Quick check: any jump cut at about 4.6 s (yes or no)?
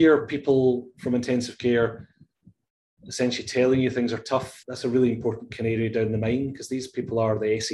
yes